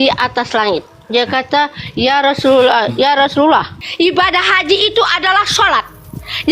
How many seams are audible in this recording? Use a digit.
1